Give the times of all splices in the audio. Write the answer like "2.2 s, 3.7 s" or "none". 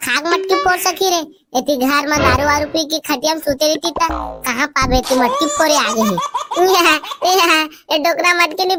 none